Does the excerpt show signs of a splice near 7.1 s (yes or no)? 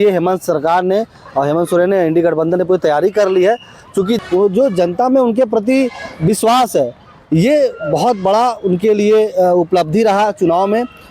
no